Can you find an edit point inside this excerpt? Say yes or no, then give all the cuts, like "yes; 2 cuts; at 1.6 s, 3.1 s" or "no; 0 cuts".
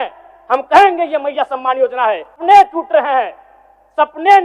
yes; 1 cut; at 2.4 s